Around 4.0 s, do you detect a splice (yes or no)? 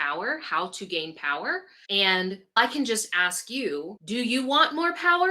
yes